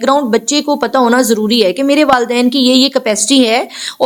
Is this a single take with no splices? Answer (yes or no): yes